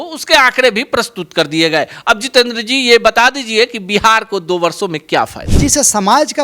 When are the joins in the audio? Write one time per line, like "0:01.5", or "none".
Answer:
0:05.4